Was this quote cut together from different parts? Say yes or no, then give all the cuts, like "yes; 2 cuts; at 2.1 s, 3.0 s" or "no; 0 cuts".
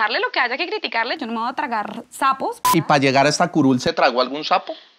yes; 1 cut; at 2.7 s